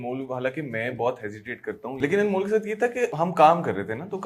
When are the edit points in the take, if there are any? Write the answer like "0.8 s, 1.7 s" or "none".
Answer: 2.0 s, 3.1 s